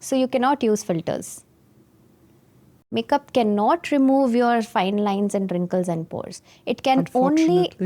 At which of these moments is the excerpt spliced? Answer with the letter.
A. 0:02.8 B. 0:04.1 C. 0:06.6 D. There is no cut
A